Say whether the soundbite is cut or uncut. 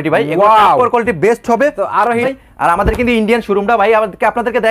cut